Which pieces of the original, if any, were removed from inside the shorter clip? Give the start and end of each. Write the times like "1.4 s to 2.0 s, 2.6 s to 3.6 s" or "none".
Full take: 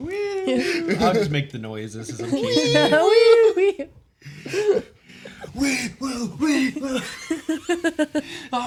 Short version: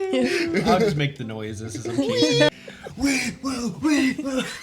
2.8 s to 5.1 s

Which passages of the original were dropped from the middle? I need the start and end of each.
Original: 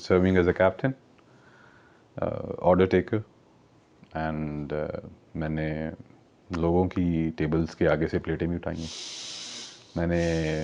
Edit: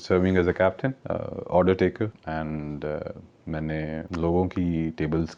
1.0 s to 2.1 s, 3.3 s to 4.1 s, 5.9 s to 6.5 s

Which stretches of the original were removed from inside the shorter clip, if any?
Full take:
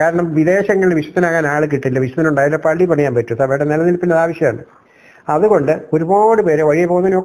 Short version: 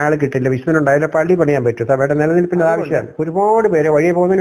4.7 s to 5.9 s

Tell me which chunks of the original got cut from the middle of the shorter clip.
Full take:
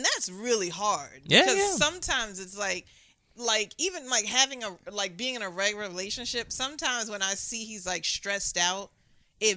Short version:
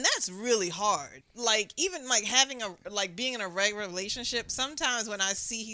1.1 s to 3.1 s

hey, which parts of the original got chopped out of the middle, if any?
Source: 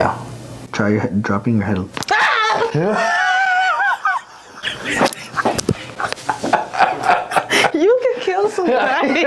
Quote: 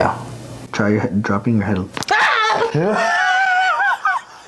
none

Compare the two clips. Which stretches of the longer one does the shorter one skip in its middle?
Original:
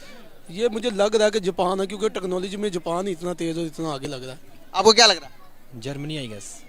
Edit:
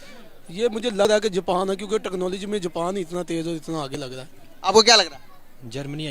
1.1 s to 1.2 s

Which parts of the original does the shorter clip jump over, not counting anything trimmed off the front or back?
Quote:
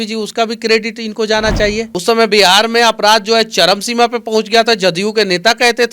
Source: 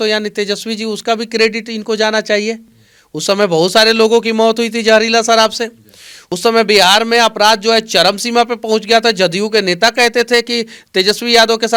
2.6 s to 6.3 s

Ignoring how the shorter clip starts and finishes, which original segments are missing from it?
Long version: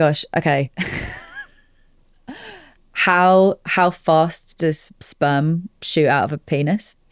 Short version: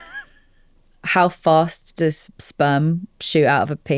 2.2 s to 3.6 s

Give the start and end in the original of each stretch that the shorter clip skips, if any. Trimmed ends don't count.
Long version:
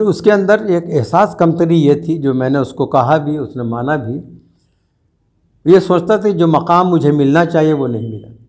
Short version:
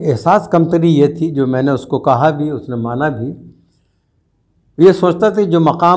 none

